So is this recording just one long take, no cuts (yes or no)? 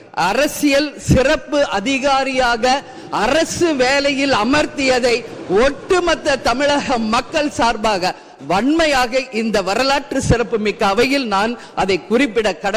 yes